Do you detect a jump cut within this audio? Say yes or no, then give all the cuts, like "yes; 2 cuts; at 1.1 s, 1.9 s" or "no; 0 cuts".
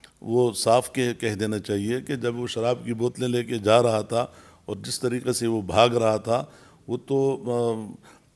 no; 0 cuts